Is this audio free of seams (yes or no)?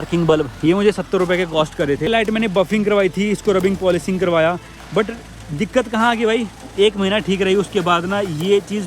no